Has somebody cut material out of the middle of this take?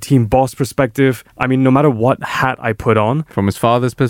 no; 0 cuts

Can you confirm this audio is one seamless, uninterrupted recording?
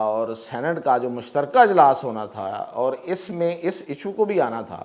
yes; 0 cuts

